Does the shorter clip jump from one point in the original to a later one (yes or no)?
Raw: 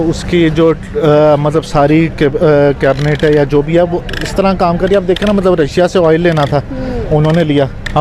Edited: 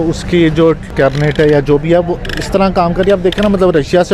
yes